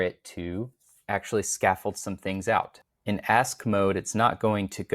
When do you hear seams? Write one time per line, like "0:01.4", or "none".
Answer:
0:02.9